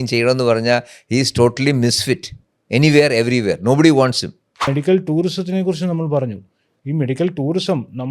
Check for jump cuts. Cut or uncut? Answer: cut